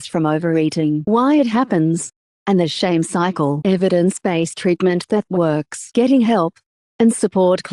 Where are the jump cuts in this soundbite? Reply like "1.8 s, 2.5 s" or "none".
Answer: 5.8 s

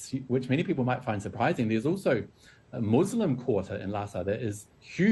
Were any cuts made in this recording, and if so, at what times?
none

